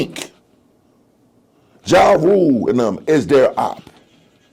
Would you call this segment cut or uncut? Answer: uncut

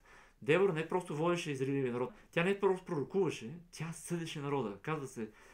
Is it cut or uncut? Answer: cut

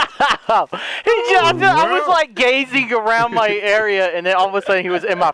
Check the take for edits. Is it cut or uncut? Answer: uncut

